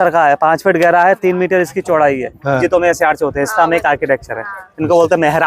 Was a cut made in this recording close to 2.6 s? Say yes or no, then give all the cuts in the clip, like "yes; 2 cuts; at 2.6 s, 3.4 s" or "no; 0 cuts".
yes; 1 cut; at 2.6 s